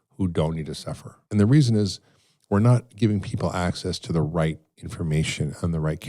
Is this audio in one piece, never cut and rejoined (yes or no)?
no